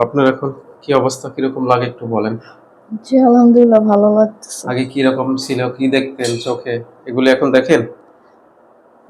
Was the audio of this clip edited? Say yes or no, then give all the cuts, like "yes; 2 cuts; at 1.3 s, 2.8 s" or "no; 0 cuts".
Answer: no; 0 cuts